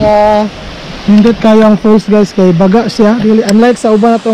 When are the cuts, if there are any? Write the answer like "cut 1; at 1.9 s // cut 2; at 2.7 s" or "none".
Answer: none